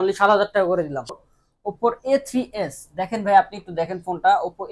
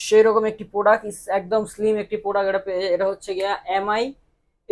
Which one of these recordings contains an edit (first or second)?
first